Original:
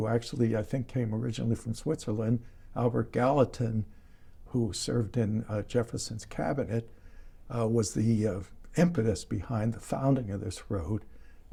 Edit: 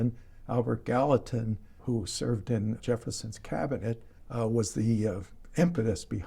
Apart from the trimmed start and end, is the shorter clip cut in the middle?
yes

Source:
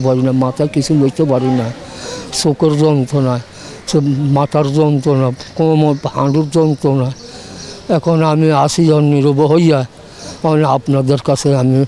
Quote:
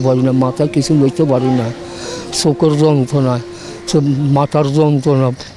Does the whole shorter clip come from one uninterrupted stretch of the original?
yes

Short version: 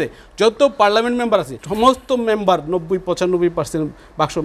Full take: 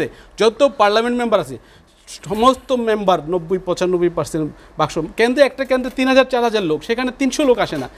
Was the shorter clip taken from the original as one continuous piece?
no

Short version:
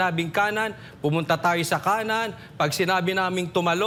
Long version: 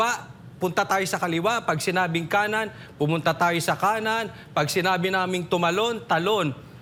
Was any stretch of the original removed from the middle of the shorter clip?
no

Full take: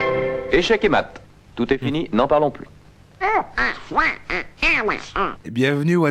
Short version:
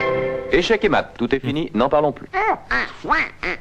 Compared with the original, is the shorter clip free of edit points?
no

